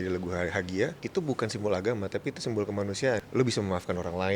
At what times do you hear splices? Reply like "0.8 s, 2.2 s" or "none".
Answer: 1.0 s, 3.2 s